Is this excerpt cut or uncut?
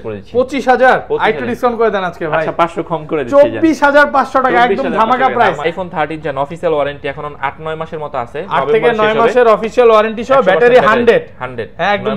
cut